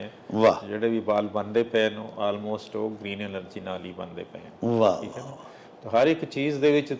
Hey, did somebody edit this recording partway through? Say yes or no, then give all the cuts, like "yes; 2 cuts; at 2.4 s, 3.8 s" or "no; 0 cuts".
no; 0 cuts